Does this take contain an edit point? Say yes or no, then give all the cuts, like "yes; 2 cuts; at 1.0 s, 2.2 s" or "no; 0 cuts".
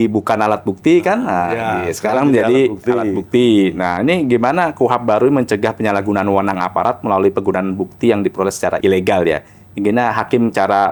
no; 0 cuts